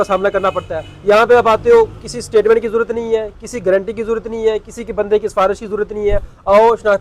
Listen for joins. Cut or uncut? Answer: uncut